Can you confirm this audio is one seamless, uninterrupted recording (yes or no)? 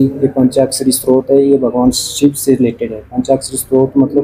yes